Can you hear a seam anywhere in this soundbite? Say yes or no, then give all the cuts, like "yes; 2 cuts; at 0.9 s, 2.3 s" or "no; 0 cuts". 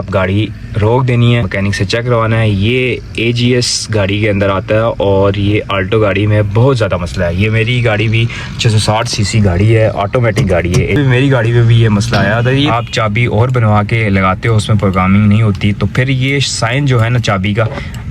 yes; 4 cuts; at 1.5 s, 9.9 s, 11.0 s, 12.7 s